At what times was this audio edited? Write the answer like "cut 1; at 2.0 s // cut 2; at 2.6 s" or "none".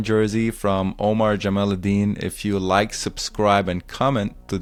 none